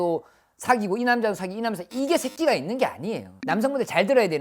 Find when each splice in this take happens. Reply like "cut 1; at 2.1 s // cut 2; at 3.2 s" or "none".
cut 1; at 3.4 s